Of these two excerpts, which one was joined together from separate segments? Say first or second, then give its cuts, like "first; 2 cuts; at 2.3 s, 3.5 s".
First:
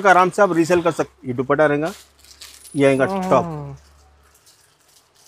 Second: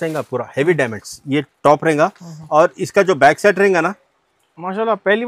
first; 1 cut; at 1.0 s